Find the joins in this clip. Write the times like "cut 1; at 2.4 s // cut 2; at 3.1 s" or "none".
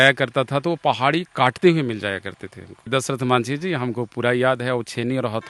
none